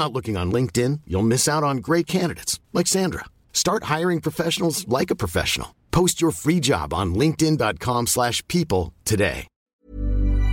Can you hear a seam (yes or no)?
yes